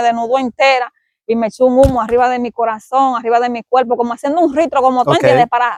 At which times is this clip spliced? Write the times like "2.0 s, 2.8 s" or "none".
none